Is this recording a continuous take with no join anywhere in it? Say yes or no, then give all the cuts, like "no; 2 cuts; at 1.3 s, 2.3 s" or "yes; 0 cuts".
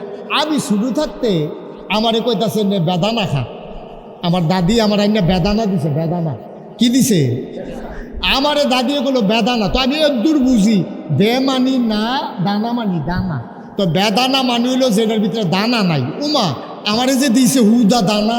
yes; 0 cuts